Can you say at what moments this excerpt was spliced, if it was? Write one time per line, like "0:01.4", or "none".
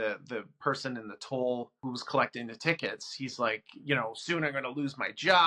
0:01.8